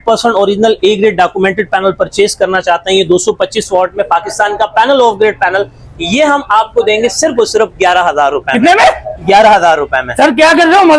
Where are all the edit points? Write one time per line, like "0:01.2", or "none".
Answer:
none

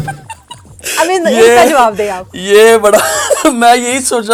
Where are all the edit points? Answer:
none

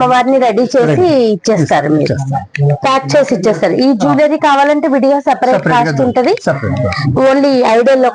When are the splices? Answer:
none

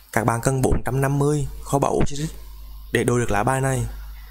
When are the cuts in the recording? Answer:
none

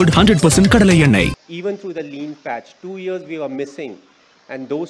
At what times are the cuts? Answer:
0:01.4

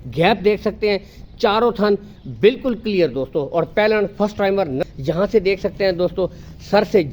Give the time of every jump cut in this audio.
0:04.8

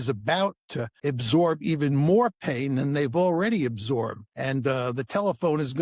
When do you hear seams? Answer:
0:01.0
0:04.3

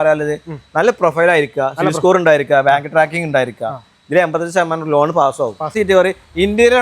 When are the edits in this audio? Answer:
0:05.7

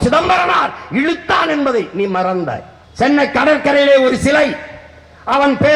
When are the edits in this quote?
0:02.7

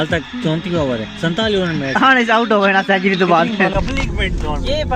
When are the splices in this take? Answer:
0:03.7

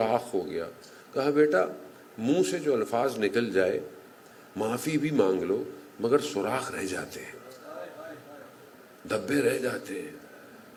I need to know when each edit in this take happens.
none

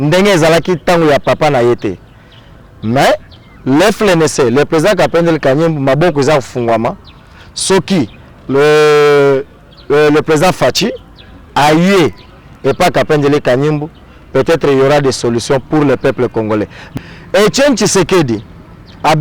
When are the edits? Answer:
0:16.8

